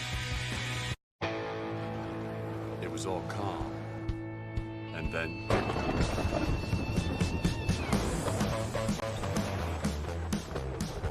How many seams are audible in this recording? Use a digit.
1